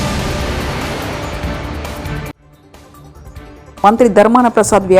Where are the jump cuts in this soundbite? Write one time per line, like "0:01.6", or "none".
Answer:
0:03.3

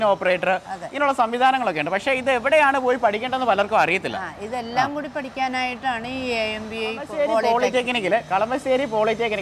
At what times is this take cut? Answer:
0:07.1

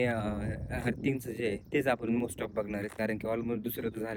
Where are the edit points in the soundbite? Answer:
none

